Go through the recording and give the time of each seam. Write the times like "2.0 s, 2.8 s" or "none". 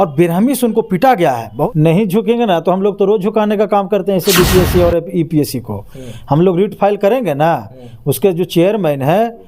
1.7 s